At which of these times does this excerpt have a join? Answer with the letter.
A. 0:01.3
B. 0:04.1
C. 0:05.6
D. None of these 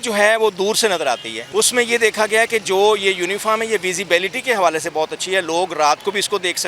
A